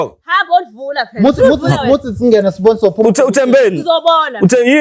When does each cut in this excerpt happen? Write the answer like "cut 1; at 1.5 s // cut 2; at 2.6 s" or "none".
none